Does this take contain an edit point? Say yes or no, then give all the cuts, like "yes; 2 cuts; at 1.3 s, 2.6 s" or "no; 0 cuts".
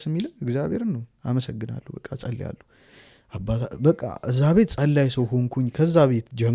no; 0 cuts